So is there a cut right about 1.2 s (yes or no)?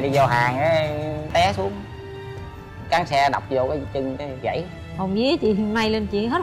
yes